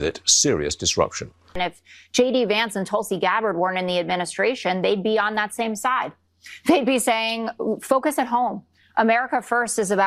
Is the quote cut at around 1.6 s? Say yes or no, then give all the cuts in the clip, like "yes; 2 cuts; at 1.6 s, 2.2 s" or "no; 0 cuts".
yes; 1 cut; at 1.6 s